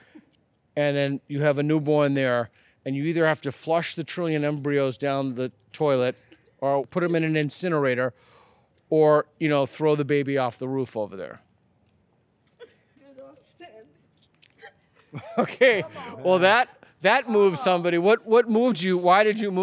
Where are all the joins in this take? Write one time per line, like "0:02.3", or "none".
0:06.9
0:12.9